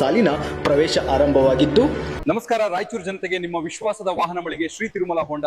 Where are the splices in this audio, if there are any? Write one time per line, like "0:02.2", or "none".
0:02.1